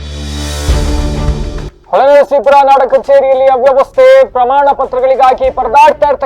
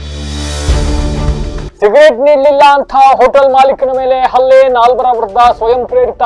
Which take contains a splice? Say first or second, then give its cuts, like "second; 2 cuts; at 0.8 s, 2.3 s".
second; 1 cut; at 1.7 s